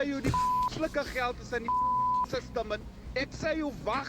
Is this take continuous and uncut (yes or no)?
yes